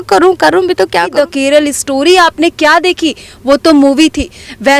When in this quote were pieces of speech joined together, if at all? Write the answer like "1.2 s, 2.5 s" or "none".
1.1 s